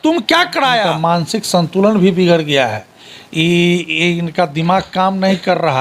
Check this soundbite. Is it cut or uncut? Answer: cut